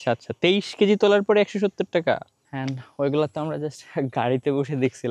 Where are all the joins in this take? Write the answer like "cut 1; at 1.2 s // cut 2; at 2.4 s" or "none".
cut 1; at 2.4 s

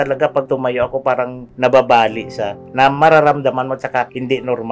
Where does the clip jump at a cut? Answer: cut 1; at 2.6 s

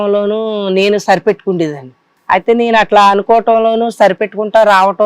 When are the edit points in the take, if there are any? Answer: cut 1; at 2.1 s

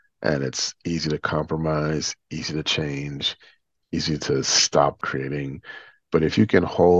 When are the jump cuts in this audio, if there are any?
cut 1; at 5.0 s

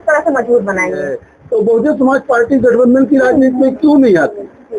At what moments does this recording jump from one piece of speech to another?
cut 1; at 1.3 s

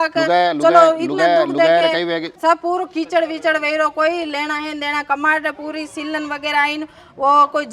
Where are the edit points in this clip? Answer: cut 1; at 2.3 s

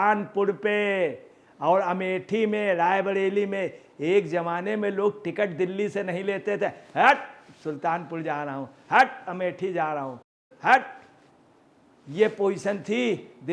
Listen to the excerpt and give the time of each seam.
none

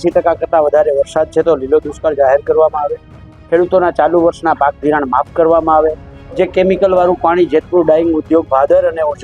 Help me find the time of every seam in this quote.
none

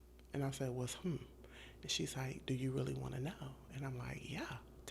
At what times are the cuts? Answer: none

